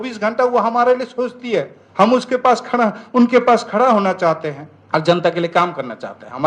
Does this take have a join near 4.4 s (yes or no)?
no